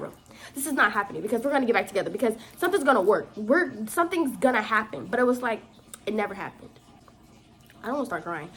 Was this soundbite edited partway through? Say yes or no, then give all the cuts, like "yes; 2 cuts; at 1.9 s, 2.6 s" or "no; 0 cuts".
no; 0 cuts